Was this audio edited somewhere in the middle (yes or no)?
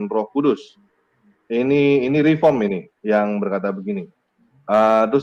no